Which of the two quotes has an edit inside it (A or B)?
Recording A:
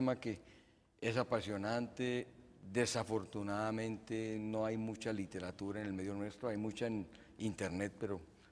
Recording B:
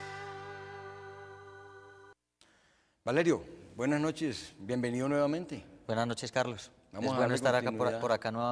B